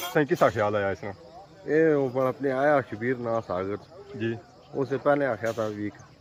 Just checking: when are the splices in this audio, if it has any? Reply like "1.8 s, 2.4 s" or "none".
none